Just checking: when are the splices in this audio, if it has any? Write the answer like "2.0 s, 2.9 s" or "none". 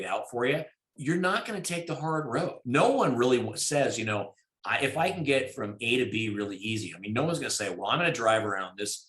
0.9 s, 2.6 s